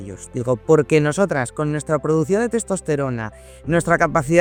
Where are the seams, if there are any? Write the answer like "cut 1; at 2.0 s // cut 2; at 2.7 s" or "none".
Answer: none